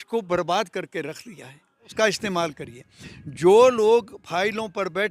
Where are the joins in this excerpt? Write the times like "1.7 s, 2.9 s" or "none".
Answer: 1.8 s